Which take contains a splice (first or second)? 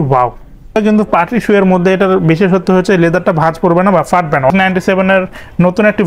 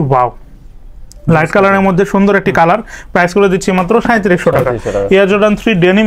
first